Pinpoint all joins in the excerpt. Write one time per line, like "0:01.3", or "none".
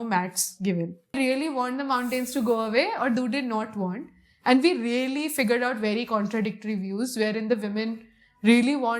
0:01.2